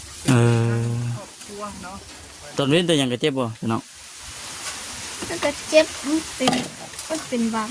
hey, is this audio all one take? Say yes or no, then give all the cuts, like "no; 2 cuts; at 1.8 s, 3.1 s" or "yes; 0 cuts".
no; 1 cut; at 2.5 s